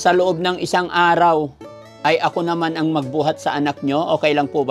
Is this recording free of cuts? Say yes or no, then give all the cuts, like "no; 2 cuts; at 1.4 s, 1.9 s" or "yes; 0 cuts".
yes; 0 cuts